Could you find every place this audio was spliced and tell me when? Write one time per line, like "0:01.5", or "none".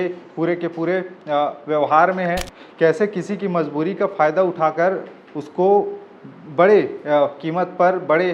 0:02.5